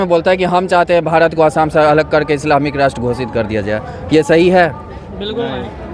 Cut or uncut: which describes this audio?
uncut